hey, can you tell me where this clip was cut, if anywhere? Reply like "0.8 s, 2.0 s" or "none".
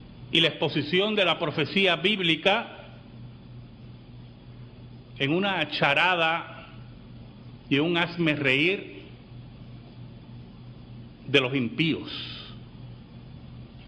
11.8 s